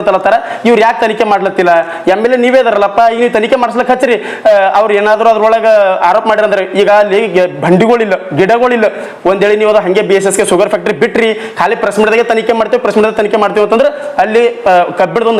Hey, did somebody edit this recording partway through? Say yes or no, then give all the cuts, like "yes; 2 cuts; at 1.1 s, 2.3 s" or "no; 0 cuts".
no; 0 cuts